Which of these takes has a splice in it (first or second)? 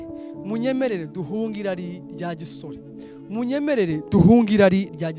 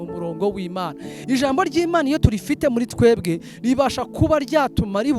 second